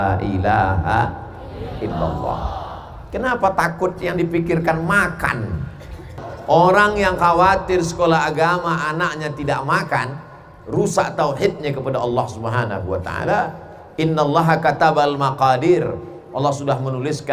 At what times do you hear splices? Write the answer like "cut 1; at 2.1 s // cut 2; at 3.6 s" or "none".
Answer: cut 1; at 6.3 s